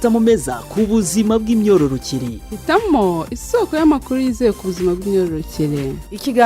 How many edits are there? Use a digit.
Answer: 0